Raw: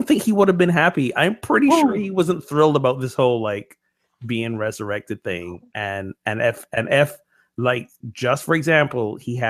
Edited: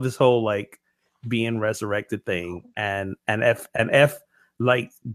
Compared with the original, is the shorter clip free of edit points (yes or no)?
yes